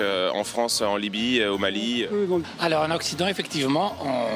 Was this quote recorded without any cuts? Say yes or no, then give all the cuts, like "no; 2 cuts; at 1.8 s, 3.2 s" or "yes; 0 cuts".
no; 1 cut; at 2.4 s